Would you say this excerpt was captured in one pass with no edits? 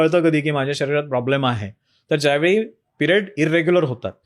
yes; 0 cuts

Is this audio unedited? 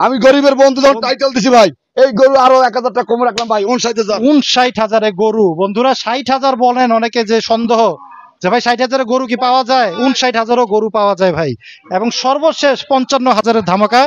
yes; 0 cuts

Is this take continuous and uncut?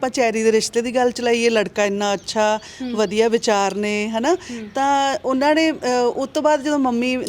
yes; 0 cuts

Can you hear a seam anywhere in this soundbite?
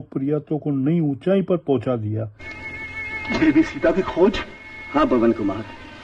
no; 0 cuts

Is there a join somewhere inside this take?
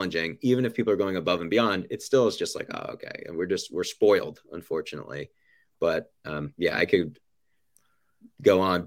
no; 0 cuts

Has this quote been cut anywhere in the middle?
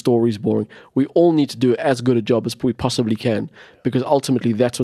no; 0 cuts

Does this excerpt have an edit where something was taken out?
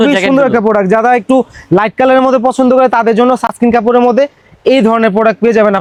no; 0 cuts

